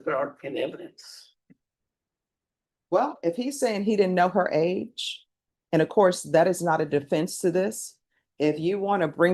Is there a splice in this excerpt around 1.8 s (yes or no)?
no